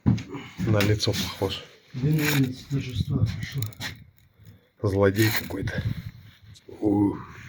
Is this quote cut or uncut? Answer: uncut